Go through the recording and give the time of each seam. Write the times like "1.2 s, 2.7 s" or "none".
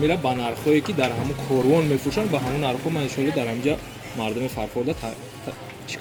none

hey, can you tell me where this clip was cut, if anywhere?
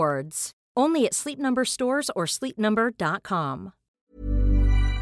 4.0 s

